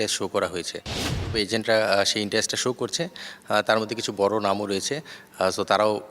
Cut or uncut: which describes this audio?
cut